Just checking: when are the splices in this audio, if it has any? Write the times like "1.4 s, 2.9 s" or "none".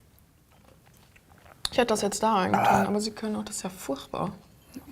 none